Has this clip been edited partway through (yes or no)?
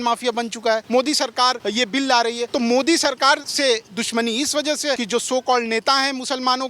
yes